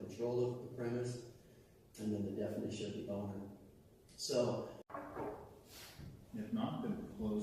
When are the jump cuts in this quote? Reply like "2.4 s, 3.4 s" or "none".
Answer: 5.0 s